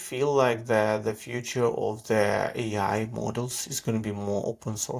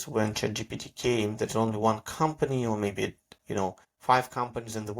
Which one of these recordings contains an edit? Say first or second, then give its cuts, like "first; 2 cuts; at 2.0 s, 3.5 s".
second; 1 cut; at 3.9 s